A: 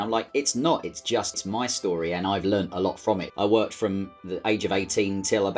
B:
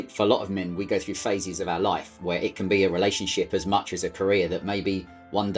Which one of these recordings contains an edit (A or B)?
A